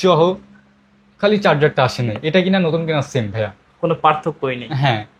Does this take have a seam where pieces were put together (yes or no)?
no